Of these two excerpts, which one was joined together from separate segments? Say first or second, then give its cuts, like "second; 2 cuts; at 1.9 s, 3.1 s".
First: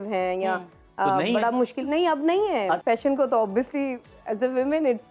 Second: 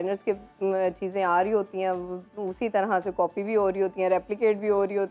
first; 1 cut; at 2.8 s